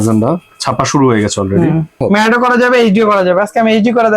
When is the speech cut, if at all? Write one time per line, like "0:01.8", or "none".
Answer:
0:02.0